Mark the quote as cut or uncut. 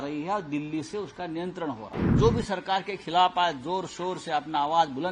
cut